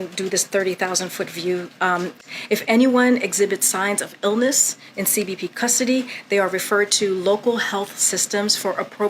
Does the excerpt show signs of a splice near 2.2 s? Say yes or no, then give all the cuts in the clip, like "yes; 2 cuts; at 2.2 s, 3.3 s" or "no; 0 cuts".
yes; 1 cut; at 2.2 s